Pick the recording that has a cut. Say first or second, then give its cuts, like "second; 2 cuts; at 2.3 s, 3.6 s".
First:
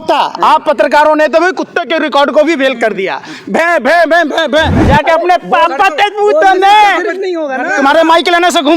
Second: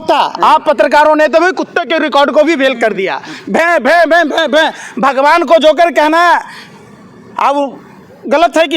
first; 1 cut; at 4.8 s